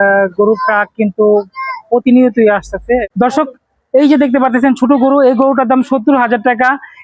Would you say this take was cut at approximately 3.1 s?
yes; 1 cut; at 3.1 s

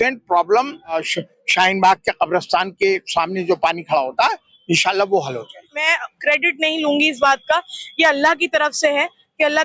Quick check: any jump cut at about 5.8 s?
yes; 2 cuts; at 1.0 s, 5.8 s

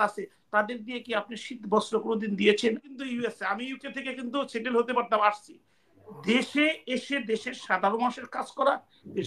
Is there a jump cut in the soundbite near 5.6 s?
no; 1 cut; at 2.8 s

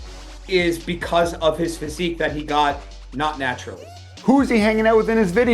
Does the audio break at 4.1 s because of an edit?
yes; 1 cut; at 4.1 s

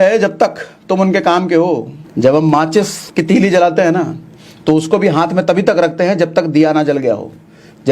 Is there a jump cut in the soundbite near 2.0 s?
yes; 2 cuts; at 2.0 s, 3.0 s

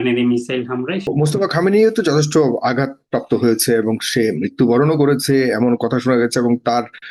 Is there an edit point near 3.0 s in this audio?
no; 1 cut; at 1.0 s

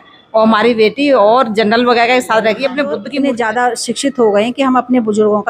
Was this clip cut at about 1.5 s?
no; 1 cut; at 3.1 s

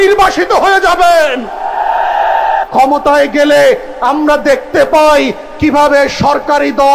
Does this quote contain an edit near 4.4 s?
no; 1 cut; at 2.6 s

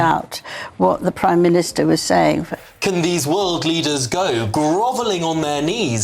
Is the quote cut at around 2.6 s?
yes; 1 cut; at 2.6 s

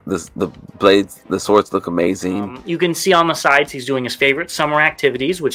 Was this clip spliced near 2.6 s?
yes; 1 cut; at 2.6 s

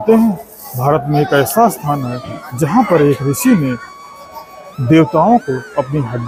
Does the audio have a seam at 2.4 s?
no; 0 cuts

